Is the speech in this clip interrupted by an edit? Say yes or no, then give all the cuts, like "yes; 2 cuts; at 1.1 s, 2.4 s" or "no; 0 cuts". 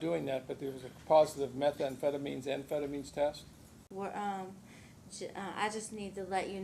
yes; 1 cut; at 3.8 s